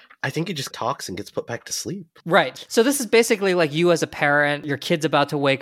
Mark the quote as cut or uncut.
cut